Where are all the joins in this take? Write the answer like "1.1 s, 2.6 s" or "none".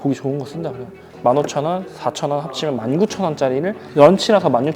1.1 s